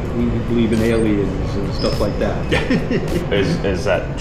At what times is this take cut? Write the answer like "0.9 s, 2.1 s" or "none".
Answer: none